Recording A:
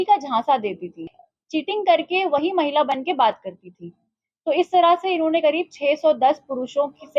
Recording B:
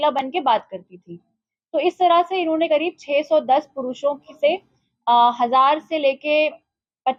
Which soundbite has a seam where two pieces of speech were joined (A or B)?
A